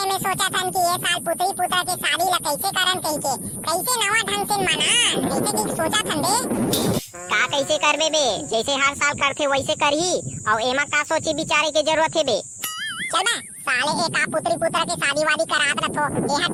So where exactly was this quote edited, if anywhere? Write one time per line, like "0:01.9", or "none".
none